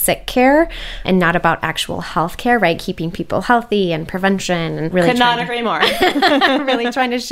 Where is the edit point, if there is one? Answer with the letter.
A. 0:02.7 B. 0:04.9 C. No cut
B